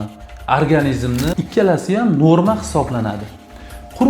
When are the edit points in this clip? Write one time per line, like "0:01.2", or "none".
0:01.3